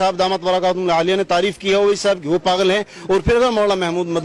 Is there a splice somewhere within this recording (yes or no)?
no